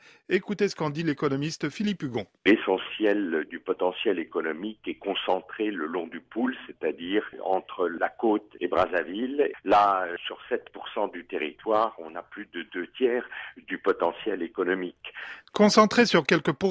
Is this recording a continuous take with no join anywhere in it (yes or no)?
yes